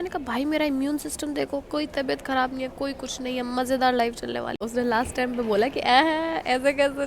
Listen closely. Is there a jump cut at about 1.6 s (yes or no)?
no